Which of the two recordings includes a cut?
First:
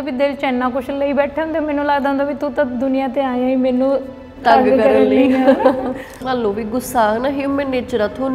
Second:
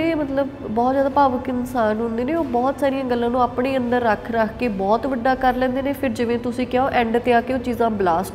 first; 1 cut; at 6.2 s

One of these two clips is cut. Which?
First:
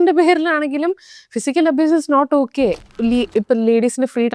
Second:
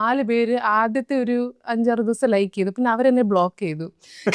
first; 1 cut; at 2.9 s

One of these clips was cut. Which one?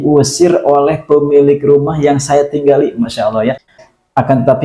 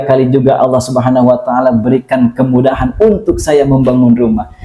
first; 1 cut; at 3.6 s

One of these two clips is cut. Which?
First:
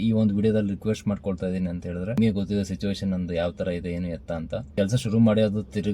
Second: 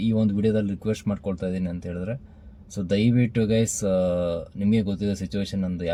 first; 2 cuts; at 2.2 s, 4.7 s

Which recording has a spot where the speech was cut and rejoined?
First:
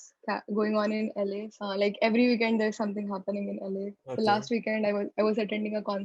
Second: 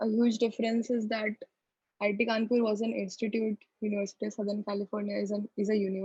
first; 2 cuts; at 1.5 s, 4.0 s

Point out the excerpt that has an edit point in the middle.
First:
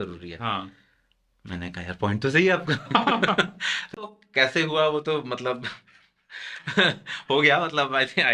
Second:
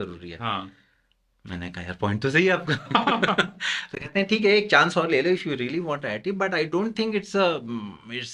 first; 1 cut; at 4.0 s

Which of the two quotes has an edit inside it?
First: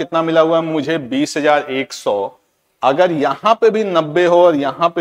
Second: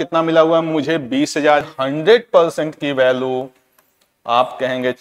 second; 1 cut; at 1.7 s

